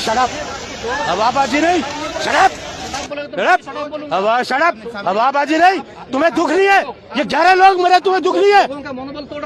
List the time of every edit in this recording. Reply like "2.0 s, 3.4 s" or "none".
none